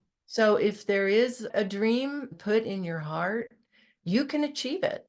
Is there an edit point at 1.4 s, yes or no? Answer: yes